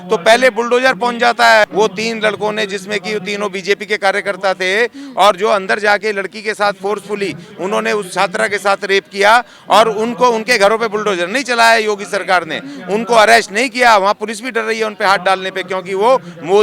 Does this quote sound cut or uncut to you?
cut